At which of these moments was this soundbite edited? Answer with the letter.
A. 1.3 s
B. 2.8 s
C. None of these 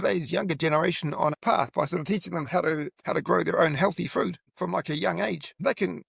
A